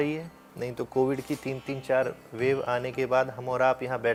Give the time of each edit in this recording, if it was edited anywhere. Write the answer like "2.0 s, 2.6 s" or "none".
none